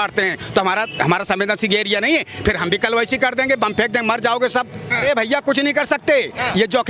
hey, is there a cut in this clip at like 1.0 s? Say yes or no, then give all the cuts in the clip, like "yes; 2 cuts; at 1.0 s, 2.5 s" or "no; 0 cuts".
no; 1 cut; at 5.0 s